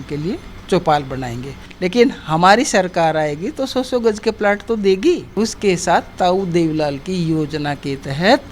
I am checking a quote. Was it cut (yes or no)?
yes